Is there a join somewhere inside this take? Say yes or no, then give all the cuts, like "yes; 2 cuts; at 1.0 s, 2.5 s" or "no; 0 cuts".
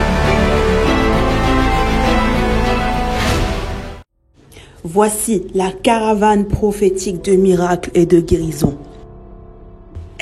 no; 0 cuts